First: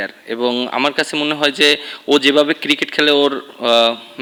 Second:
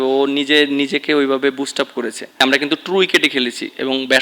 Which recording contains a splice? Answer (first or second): second